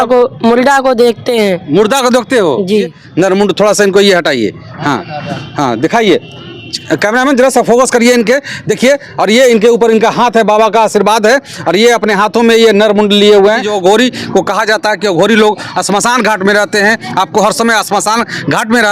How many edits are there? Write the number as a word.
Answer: two